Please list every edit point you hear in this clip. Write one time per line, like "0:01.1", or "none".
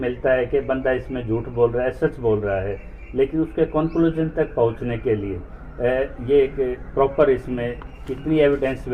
none